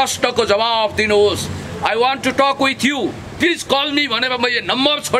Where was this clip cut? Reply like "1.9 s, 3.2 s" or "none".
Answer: 1.6 s